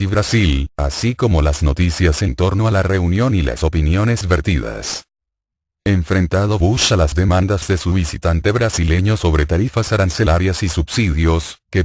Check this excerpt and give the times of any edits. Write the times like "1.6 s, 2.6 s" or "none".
10.3 s